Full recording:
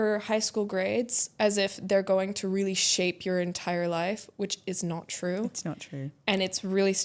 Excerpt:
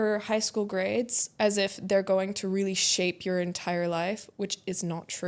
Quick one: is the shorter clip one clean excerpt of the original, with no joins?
yes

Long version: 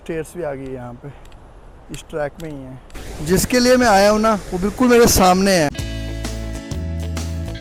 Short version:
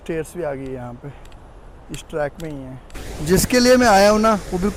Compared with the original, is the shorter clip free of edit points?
yes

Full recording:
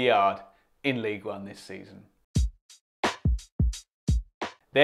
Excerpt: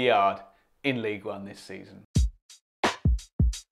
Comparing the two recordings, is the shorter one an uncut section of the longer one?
no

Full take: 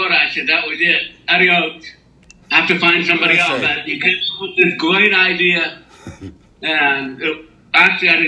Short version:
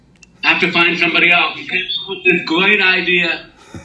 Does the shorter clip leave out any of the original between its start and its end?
yes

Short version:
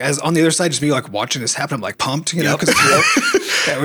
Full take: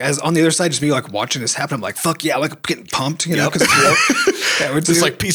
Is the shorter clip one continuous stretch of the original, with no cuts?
no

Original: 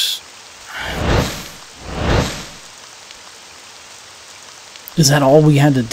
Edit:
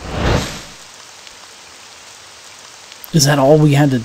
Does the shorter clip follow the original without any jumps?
yes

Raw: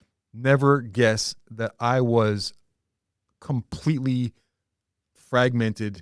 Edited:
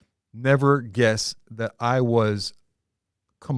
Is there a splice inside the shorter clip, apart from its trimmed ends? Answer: no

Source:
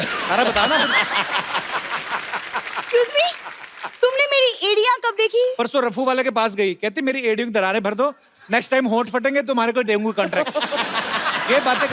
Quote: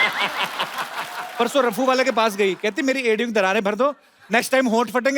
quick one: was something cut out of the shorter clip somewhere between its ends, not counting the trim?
yes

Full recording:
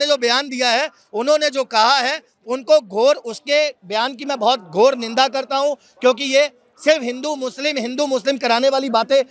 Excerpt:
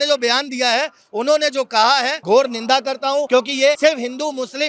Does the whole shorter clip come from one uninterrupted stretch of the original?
no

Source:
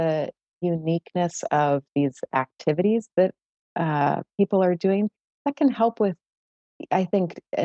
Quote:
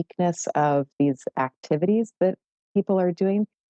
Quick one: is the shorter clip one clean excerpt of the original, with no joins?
no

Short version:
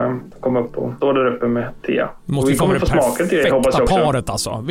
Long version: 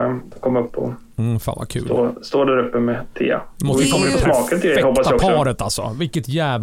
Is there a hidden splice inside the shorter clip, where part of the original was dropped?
yes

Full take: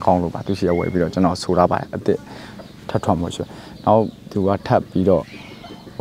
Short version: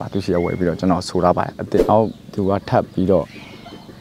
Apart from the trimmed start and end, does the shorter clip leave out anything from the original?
yes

